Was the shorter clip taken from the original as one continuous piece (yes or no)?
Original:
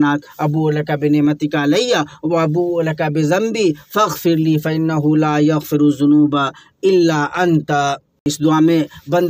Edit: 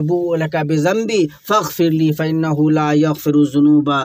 yes